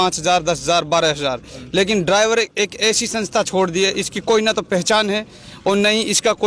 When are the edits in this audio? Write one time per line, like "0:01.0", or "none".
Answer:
none